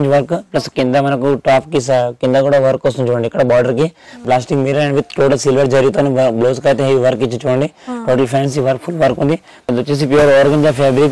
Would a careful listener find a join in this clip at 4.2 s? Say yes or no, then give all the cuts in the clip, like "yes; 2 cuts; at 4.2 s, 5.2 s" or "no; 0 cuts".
yes; 2 cuts; at 4.2 s, 9.5 s